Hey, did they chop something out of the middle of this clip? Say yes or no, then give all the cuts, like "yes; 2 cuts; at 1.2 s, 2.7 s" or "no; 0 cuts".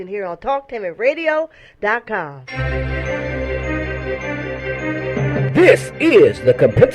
yes; 1 cut; at 2.3 s